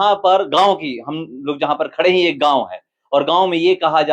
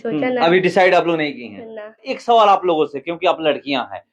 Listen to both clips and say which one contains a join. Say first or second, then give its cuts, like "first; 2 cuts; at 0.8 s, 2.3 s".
second; 1 cut; at 2.1 s